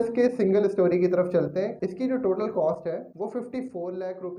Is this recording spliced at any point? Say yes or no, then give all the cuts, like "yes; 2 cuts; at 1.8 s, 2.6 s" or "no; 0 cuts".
no; 0 cuts